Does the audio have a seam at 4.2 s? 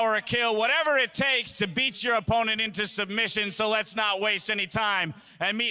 yes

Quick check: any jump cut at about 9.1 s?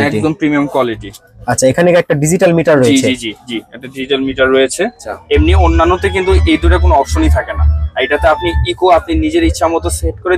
no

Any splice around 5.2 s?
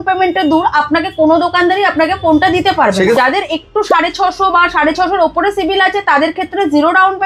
no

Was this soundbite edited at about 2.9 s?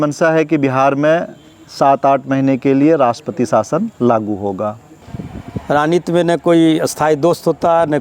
no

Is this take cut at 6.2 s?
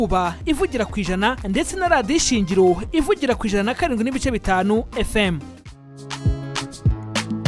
yes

